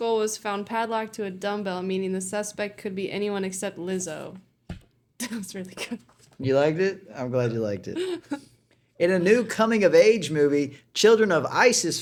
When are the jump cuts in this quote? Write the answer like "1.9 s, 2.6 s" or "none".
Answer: none